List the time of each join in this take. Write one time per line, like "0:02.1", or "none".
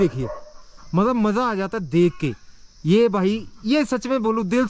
none